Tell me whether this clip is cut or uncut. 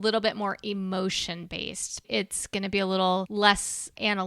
cut